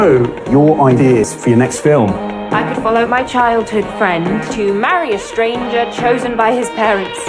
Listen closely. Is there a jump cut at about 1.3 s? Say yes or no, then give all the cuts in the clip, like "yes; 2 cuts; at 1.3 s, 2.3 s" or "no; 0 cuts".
yes; 1 cut; at 1.3 s